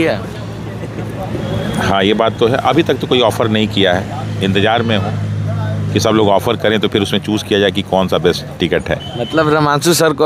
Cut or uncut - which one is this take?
uncut